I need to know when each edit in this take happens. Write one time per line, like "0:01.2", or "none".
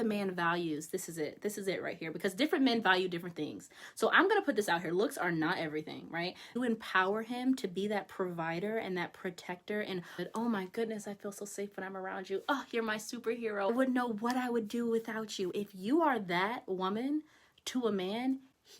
0:06.6
0:10.2
0:13.7